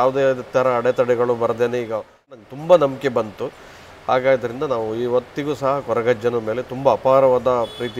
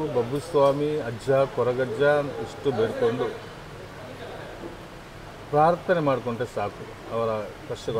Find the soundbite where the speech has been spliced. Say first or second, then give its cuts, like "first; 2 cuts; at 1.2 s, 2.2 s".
first; 1 cut; at 2.4 s